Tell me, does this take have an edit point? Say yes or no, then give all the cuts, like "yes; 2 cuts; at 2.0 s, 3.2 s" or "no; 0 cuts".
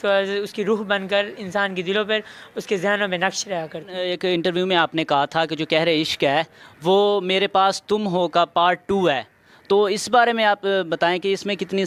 yes; 1 cut; at 3.9 s